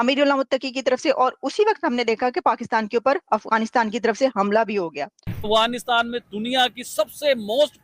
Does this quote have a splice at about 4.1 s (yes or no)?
no